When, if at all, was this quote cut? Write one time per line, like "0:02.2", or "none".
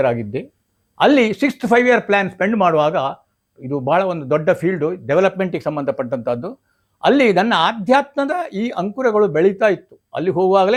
none

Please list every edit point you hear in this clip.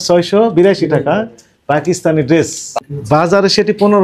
0:02.8

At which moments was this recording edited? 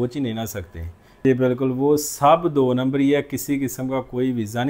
0:01.2

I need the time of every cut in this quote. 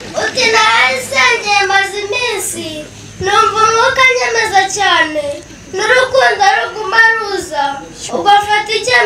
none

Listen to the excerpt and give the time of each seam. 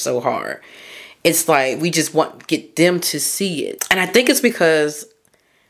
0:03.8

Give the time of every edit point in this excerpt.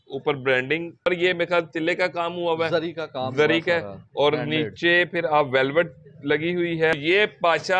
0:01.1
0:06.9

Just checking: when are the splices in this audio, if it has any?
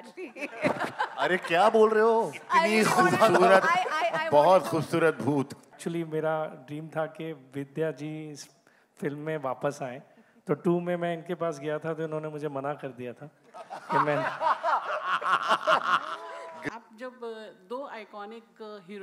0:05.7
0:16.6

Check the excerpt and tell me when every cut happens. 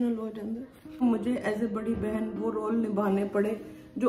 0:01.0

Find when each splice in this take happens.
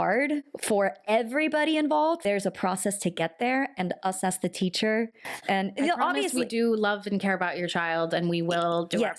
0:02.2
0:05.3

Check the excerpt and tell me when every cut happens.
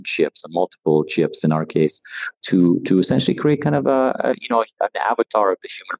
0:02.3

